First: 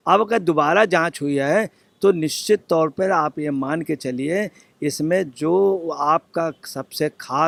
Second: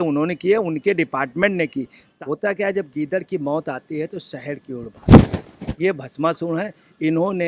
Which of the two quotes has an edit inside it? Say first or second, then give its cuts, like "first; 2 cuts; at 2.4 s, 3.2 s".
second; 2 cuts; at 2.0 s, 5.5 s